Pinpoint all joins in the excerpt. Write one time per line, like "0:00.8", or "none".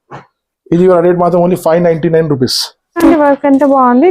0:03.0